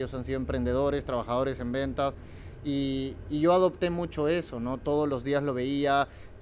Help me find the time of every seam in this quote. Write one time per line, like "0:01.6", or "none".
none

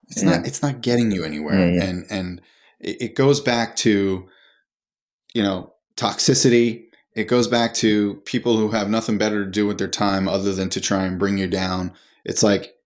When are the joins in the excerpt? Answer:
none

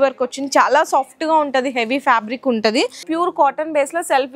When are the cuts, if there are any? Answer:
0:02.9

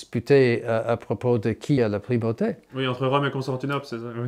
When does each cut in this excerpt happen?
0:01.8
0:02.7

